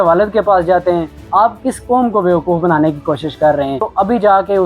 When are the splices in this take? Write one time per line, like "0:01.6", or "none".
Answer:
0:01.2
0:03.9